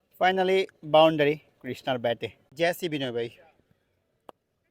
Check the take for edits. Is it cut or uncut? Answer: cut